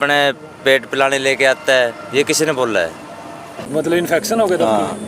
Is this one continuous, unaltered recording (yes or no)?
no